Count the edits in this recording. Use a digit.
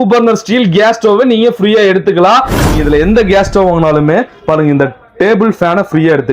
1